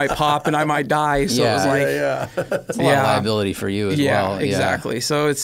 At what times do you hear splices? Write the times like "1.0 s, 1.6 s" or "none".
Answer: none